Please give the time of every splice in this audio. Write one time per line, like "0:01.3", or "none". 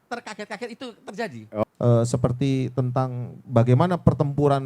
0:01.6